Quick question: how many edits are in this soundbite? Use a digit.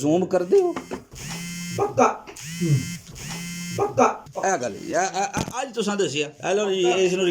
1